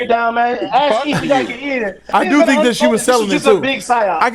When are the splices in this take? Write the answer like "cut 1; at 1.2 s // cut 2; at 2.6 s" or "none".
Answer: cut 1; at 2.1 s